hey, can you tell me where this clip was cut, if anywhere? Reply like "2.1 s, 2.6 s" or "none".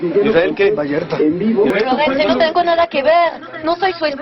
1.7 s